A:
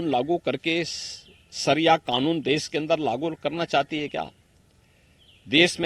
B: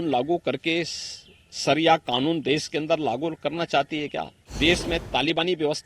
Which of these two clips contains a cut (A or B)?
B